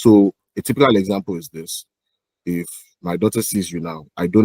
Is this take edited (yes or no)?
no